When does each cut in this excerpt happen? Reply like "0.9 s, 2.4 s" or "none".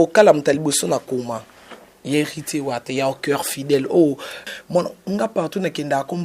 4.5 s